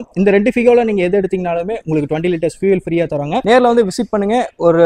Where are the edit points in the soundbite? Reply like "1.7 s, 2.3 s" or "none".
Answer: none